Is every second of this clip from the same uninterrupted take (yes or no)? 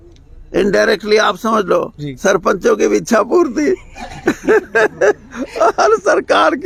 yes